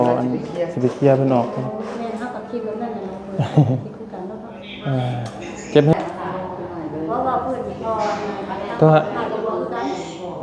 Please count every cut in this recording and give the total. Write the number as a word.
one